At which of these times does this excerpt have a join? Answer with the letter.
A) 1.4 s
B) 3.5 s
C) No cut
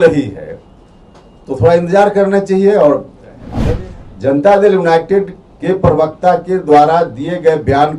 B